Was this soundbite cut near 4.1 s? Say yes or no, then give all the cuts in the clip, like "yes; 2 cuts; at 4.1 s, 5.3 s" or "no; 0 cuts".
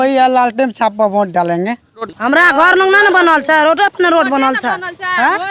no; 1 cut; at 2.1 s